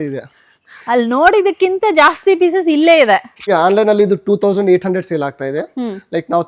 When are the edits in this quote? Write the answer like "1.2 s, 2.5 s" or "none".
3.5 s